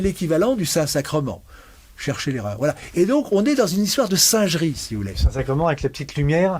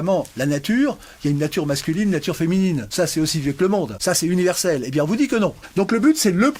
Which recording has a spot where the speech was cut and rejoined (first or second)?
second